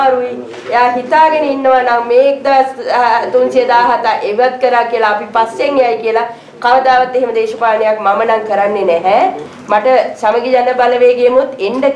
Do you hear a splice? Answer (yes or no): yes